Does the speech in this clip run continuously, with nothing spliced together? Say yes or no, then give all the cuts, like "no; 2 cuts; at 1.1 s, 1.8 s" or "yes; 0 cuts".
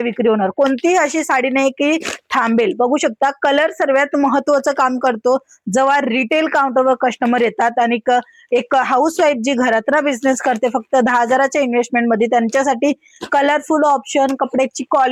yes; 0 cuts